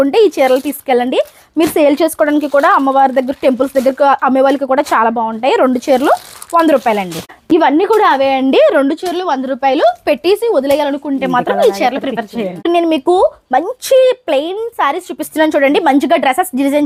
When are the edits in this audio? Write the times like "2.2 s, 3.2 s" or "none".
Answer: none